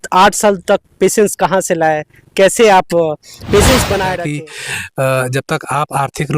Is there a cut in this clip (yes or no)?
yes